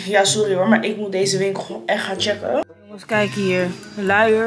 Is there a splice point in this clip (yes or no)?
yes